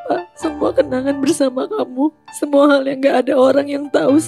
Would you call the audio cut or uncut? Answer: uncut